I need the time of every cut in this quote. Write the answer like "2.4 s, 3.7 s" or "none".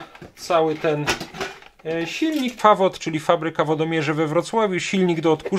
2.6 s